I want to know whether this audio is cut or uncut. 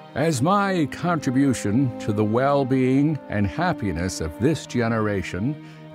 uncut